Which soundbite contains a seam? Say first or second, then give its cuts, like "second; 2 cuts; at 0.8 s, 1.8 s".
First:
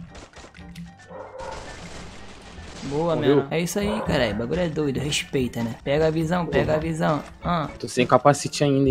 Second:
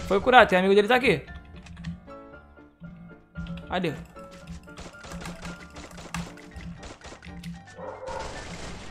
first; 2 cuts; at 3.5 s, 7.8 s